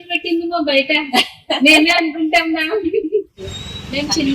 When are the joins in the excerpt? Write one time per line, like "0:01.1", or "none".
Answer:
0:03.4